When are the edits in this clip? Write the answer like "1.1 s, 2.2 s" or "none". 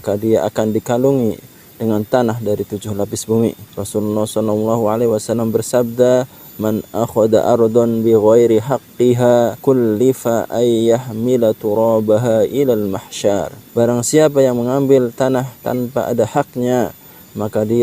3.7 s, 9.6 s, 13.6 s